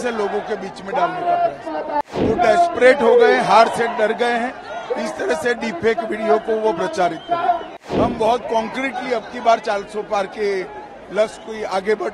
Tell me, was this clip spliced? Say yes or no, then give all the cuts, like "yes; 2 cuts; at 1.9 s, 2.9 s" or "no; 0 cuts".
yes; 2 cuts; at 2.1 s, 7.7 s